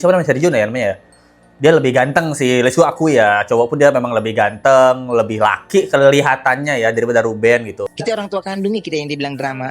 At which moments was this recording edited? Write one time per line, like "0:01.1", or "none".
0:07.9

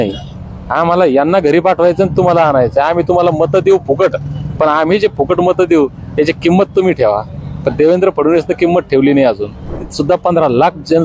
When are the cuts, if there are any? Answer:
0:09.9

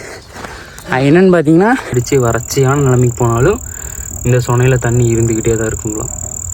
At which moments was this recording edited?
0:02.0

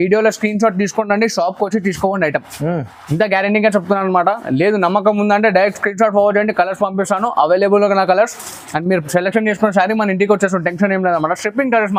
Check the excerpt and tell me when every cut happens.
none

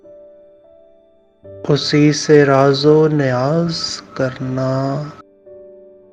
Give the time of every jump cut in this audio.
0:01.4
0:05.1

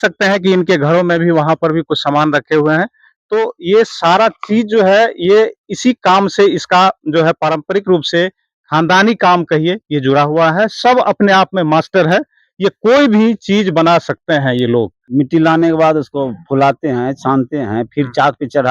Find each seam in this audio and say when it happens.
0:15.0

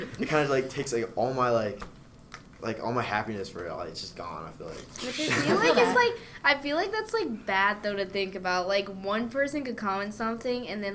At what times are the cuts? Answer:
0:04.9

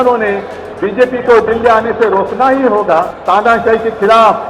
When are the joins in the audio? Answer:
0:03.2

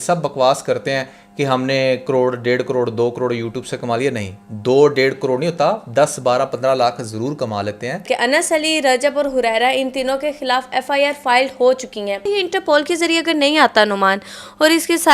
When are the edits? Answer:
0:08.0
0:12.2

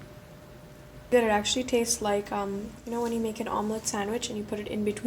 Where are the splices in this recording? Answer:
0:01.1

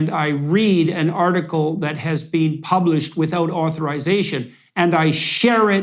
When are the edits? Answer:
none

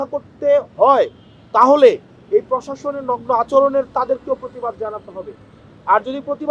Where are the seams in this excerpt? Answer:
none

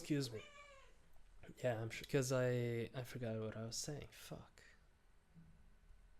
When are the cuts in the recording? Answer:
0:02.0

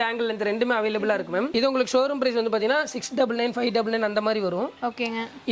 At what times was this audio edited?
none

